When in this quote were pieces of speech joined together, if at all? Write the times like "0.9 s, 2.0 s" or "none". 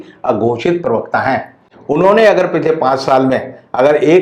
none